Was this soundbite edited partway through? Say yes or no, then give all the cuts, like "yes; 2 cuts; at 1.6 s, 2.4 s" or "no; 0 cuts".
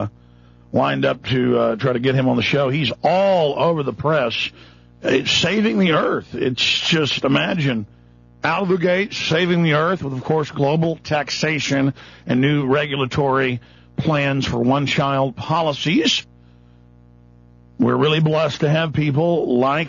no; 0 cuts